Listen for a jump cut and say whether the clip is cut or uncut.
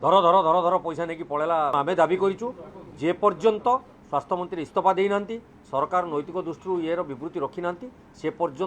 cut